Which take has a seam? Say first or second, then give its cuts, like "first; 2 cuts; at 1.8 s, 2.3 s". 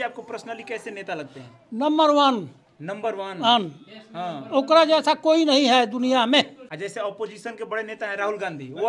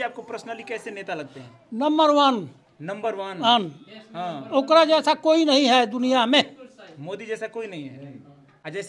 first; 1 cut; at 6.6 s